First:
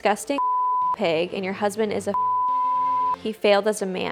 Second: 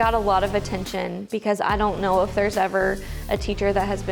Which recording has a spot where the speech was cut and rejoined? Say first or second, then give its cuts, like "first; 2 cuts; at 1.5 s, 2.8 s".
second; 1 cut; at 1.2 s